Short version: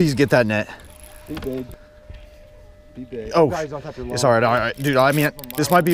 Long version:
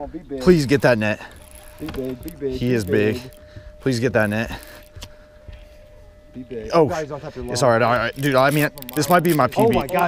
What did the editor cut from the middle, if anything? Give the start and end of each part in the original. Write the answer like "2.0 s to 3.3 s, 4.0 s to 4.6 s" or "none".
2.3 s to 5.1 s